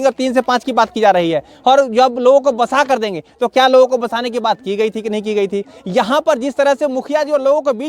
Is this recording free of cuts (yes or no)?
yes